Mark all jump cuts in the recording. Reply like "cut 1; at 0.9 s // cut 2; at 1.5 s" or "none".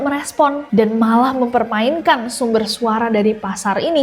none